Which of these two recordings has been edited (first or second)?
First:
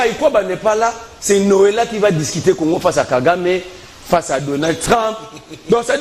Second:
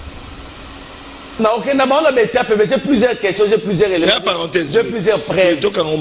second